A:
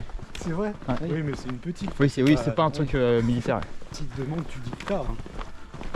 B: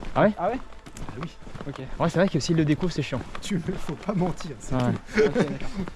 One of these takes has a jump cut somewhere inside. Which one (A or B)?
A